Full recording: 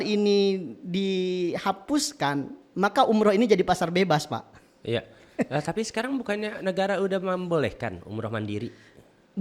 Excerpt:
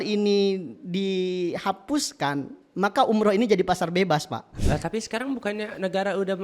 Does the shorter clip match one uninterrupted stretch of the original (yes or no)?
no